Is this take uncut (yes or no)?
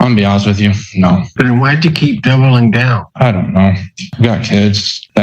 no